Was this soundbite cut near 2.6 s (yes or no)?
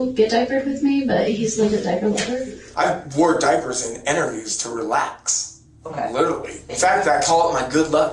yes